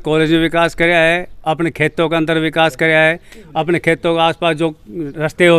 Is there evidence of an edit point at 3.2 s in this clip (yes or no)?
no